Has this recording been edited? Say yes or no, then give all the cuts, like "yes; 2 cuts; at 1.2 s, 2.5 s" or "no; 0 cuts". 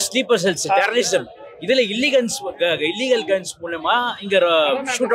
no; 0 cuts